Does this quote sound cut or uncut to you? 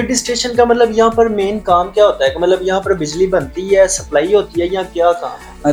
uncut